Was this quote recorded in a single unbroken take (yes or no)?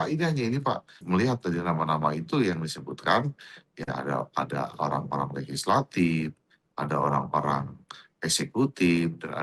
no